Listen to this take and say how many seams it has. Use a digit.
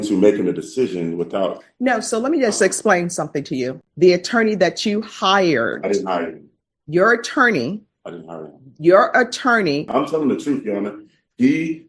2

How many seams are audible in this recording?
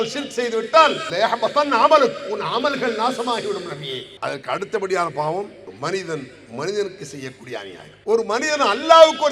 3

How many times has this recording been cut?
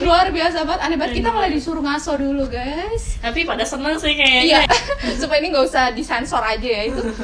1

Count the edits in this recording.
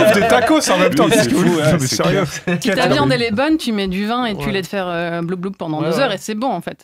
1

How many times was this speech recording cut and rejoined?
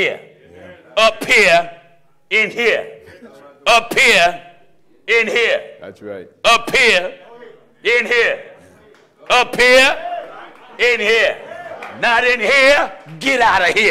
0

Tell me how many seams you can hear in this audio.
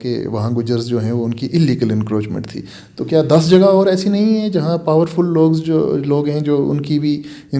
0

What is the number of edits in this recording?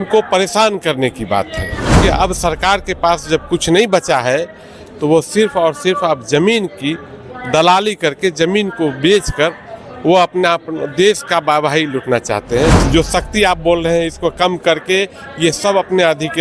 2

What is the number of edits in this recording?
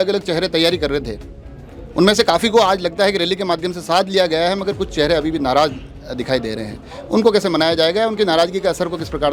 0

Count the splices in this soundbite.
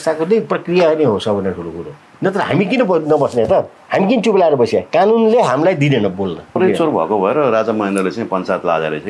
2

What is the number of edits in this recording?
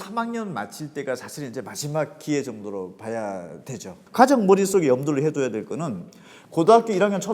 1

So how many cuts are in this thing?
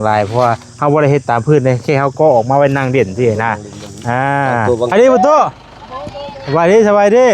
1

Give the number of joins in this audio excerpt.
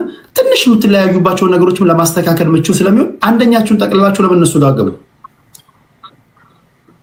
0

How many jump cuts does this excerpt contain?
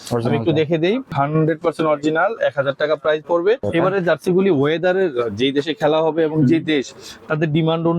2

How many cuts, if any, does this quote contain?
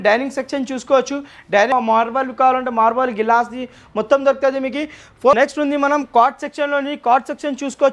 2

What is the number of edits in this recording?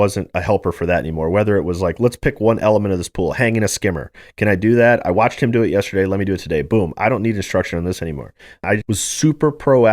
1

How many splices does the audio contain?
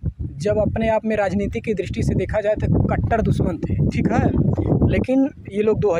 0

